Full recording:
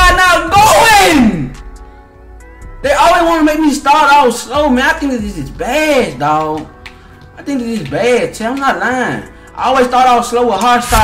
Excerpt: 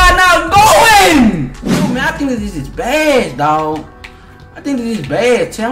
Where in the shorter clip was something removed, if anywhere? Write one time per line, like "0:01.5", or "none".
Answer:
0:01.9